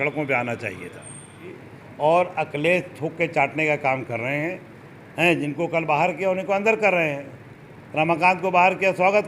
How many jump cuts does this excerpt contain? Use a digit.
1